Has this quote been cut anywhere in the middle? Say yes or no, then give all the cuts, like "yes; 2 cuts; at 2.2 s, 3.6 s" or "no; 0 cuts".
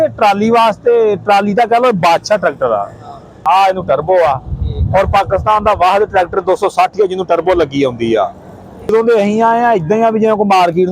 yes; 2 cuts; at 3.4 s, 8.9 s